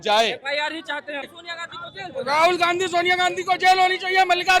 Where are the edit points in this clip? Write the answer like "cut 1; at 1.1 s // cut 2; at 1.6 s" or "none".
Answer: cut 1; at 1.3 s